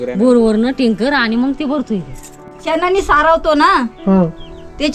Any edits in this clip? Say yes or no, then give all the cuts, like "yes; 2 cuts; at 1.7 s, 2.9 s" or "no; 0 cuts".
yes; 1 cut; at 2.4 s